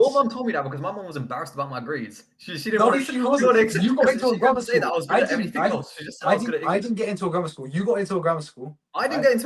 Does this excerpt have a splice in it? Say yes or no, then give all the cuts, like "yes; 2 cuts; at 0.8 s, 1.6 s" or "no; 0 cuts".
no; 0 cuts